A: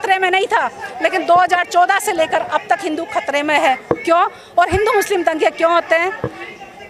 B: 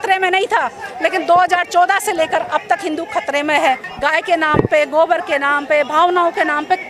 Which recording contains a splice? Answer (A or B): B